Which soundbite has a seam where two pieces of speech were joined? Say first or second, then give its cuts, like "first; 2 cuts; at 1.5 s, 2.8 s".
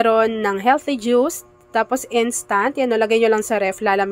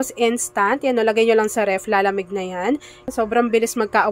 second; 1 cut; at 3.1 s